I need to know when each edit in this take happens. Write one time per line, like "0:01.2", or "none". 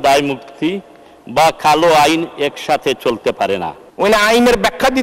0:03.8